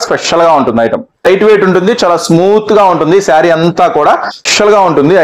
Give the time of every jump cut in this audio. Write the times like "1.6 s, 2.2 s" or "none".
1.3 s, 4.4 s